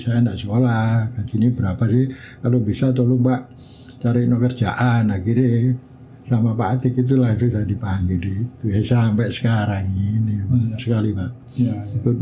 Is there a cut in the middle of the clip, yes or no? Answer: yes